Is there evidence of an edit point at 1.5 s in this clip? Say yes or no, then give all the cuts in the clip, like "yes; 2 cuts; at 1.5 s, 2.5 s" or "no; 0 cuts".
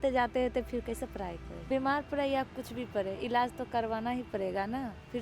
yes; 1 cut; at 1.5 s